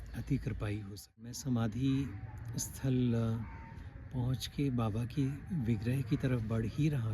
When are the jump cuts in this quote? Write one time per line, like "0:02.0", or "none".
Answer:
0:01.4